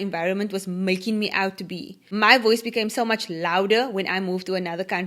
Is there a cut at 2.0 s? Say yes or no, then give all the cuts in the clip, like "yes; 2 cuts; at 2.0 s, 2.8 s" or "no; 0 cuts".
yes; 1 cut; at 2.0 s